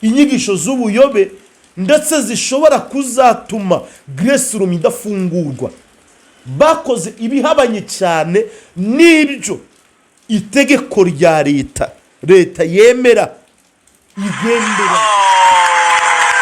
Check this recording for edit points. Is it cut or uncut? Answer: cut